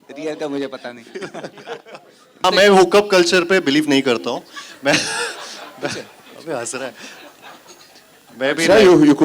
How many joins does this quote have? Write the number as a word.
one